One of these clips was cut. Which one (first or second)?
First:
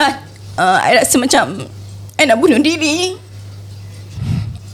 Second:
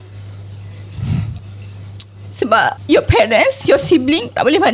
second